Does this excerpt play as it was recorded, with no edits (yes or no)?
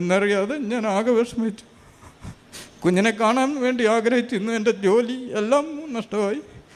yes